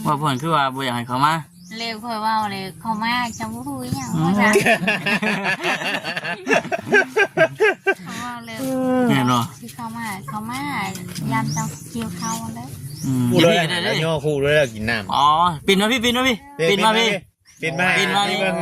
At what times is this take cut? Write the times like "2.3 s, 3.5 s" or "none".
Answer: 13.3 s